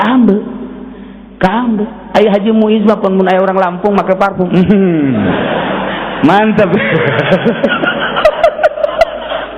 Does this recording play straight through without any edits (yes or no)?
yes